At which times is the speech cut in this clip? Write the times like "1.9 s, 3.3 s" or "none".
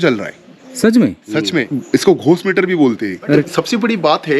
1.7 s, 3.5 s